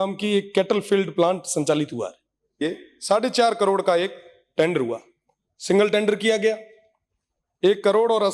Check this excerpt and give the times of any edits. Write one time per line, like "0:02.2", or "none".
0:02.6